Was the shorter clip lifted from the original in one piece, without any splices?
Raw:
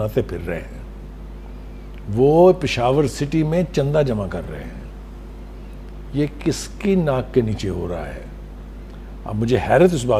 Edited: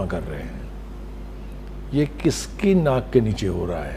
yes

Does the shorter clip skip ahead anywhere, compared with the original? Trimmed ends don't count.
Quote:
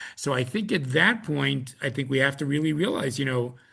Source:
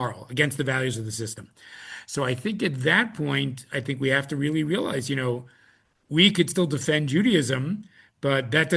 no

